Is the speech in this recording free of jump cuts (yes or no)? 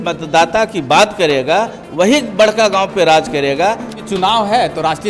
no